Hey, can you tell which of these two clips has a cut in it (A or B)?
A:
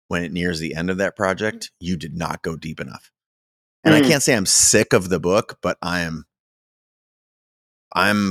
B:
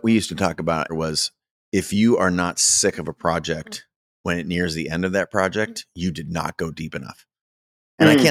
B